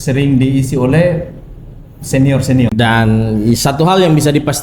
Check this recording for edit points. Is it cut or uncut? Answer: cut